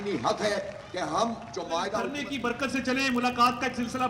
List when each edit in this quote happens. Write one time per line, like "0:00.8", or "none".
0:02.1